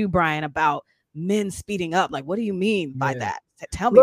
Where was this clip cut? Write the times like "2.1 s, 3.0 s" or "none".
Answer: none